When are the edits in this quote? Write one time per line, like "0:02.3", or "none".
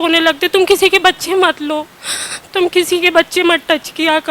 none